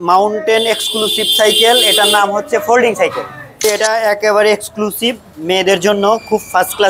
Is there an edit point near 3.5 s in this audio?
yes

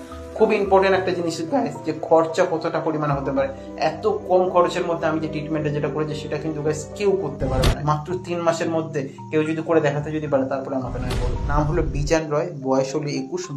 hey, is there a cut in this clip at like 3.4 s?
no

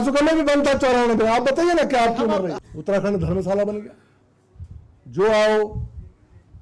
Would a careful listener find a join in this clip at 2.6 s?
yes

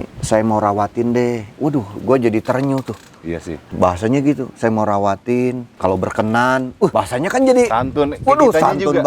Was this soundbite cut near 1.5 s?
no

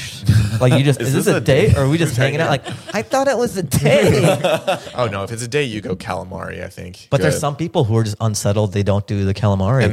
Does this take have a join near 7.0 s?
yes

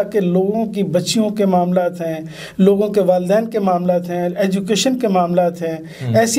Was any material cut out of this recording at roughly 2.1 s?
no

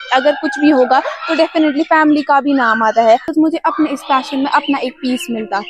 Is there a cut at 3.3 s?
yes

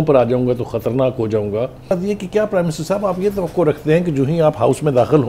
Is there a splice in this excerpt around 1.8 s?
yes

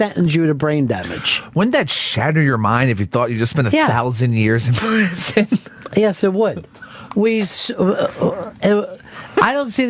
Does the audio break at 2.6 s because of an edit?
yes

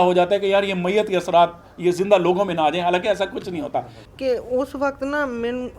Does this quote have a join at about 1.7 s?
no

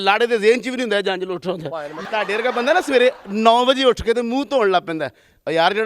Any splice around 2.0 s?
yes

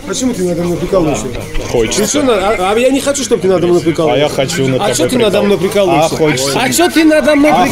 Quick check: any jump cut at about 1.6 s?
no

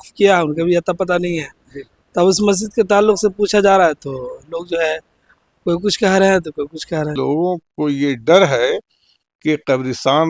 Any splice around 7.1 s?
yes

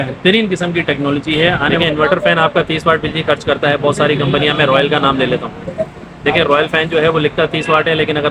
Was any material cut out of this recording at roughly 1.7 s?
yes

